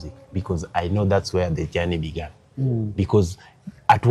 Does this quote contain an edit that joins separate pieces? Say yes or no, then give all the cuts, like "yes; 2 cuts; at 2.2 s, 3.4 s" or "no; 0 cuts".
no; 0 cuts